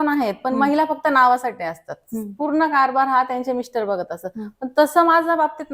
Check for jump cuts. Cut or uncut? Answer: uncut